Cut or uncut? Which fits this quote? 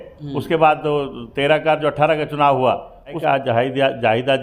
cut